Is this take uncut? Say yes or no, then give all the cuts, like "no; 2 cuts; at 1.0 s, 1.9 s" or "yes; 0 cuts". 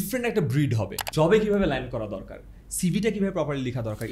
no; 1 cut; at 1.0 s